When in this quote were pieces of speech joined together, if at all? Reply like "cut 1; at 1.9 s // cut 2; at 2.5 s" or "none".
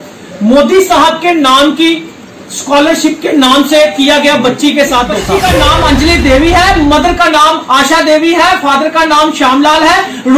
cut 1; at 5.2 s